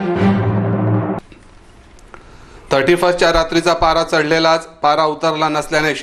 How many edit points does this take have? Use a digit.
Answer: 1